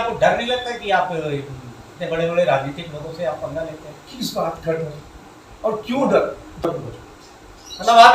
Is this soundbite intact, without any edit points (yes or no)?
no